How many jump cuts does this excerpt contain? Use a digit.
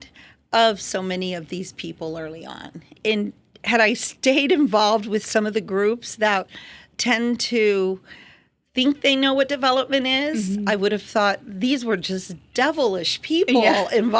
2